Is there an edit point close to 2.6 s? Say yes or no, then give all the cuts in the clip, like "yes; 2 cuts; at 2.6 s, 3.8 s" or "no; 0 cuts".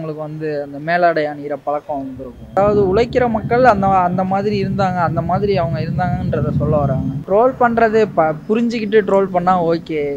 yes; 2 cuts; at 2.6 s, 7.2 s